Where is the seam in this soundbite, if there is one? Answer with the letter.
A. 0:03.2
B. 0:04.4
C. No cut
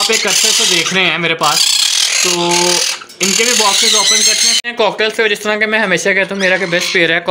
B